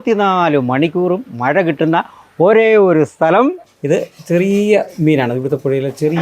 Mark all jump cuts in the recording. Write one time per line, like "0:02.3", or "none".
0:03.7

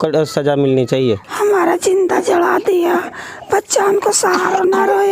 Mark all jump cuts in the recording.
0:01.3

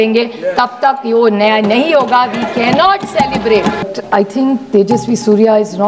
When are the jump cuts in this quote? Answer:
0:03.8

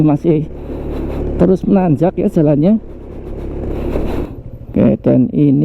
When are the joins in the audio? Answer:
0:04.3

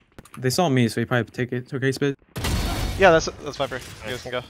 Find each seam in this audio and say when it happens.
none

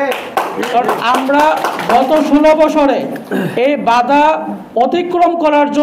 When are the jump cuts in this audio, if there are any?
none

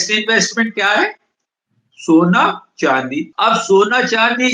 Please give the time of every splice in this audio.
0:03.3

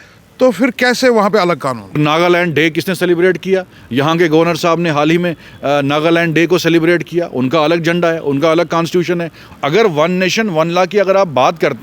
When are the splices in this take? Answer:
0:02.0
0:09.4

